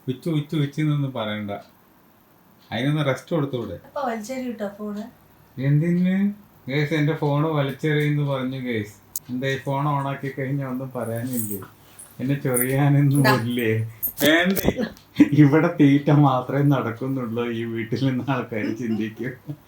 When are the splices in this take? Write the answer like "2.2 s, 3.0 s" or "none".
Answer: 3.8 s, 15.0 s